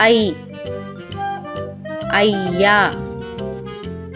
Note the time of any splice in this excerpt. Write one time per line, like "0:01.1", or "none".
0:02.9

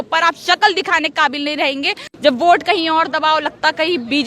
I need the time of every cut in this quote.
0:02.1

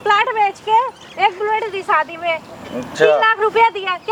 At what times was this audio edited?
none

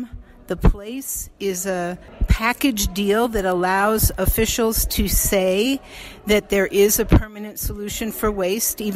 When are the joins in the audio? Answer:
0:02.1

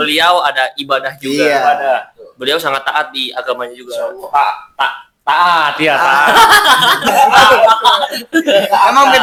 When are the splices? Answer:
none

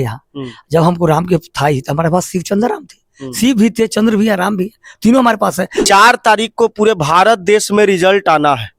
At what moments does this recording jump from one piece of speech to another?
0:05.8

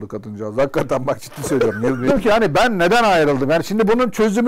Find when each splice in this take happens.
0:02.1

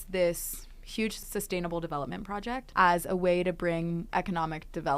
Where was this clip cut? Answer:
0:01.2
0:02.7
0:04.1

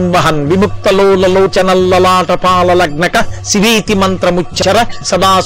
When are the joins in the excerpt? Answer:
none

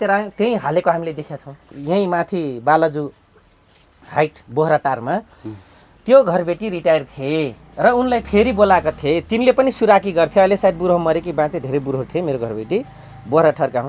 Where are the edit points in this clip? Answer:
0:01.8

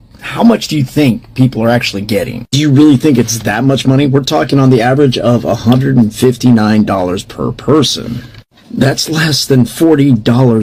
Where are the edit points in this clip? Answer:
none

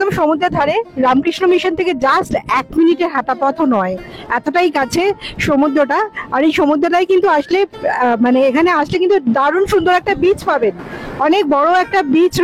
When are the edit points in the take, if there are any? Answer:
none

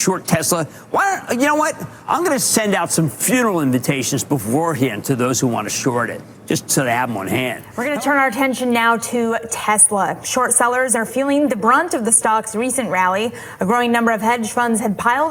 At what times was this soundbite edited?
none

